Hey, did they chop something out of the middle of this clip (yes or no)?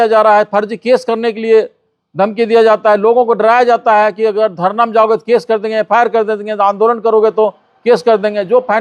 no